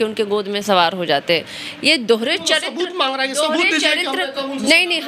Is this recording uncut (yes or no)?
yes